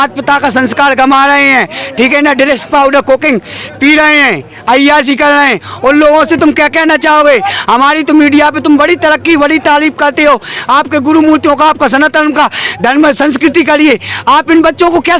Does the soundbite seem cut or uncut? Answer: uncut